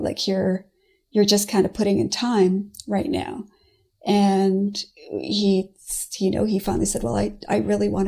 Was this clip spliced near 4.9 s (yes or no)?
no